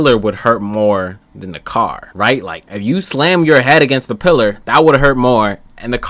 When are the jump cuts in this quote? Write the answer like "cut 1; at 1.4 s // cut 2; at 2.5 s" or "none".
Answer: none